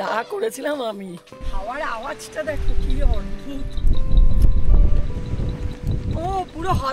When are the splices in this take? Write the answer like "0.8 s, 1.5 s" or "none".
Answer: 1.4 s